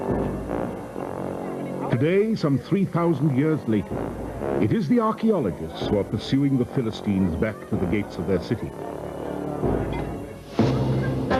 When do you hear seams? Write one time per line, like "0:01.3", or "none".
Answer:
none